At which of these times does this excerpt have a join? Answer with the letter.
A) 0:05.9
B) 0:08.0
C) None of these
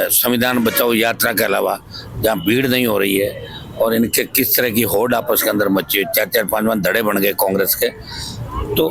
C